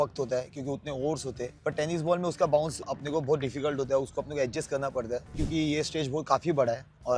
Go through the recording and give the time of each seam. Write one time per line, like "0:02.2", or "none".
0:01.5
0:02.8
0:05.4

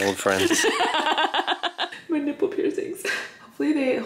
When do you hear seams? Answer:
0:01.9

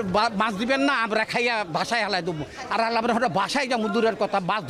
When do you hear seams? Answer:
none

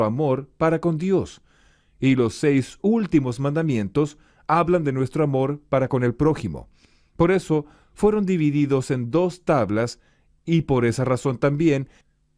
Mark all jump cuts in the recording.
0:08.2

